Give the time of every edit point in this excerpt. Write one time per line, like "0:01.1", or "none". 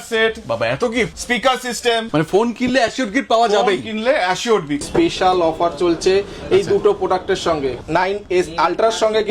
0:01.2
0:02.1
0:04.9
0:07.8